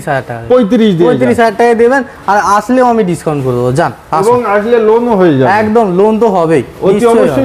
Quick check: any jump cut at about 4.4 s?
no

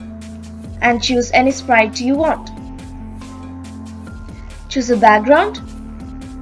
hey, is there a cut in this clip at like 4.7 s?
yes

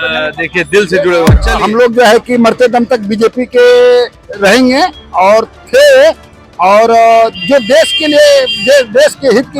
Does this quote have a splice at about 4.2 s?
yes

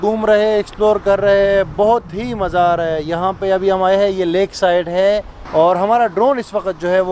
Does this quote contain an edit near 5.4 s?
yes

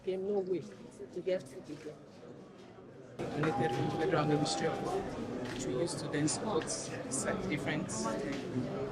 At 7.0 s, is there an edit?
no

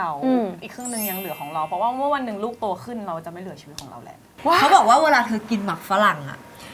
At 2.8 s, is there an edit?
no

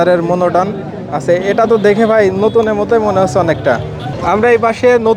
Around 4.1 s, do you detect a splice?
yes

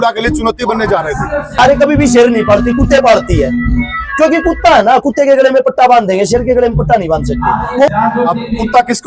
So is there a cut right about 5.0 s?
no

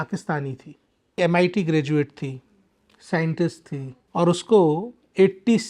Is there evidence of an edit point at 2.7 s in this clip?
no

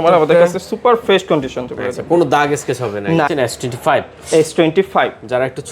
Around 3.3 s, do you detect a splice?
yes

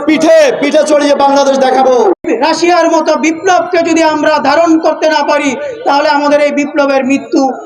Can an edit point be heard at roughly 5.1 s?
no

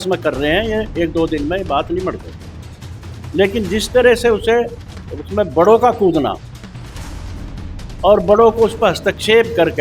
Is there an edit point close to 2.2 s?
no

